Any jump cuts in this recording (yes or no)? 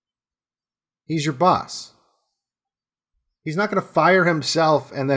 yes